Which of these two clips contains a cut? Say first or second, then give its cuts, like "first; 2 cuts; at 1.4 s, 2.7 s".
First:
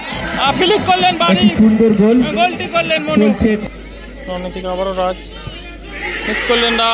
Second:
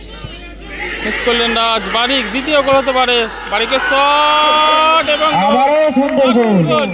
first; 1 cut; at 3.6 s